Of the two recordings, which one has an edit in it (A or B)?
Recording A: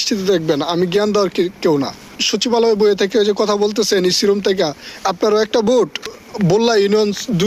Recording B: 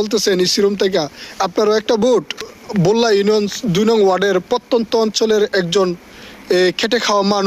A